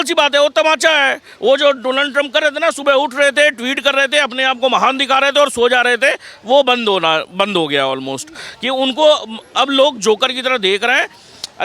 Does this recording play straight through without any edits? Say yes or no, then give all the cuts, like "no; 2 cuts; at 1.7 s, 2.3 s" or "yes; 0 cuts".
yes; 0 cuts